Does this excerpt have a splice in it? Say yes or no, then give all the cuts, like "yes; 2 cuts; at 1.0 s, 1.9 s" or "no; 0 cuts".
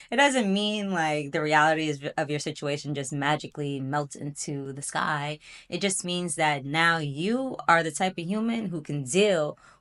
no; 0 cuts